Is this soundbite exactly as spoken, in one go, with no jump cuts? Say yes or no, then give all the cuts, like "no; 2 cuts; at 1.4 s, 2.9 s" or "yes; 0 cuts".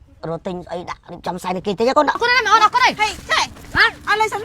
no; 1 cut; at 2.2 s